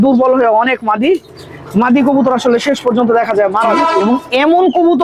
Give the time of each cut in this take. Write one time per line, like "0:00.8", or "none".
0:03.9